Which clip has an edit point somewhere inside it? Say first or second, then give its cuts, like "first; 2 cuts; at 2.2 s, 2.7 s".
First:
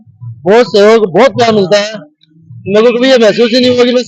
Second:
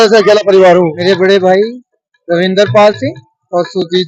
second; 1 cut; at 1.0 s